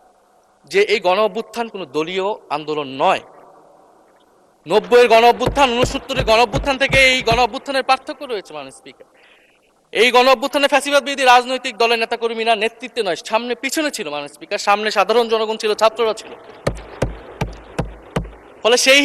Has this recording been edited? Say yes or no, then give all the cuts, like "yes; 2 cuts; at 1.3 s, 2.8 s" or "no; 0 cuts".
no; 0 cuts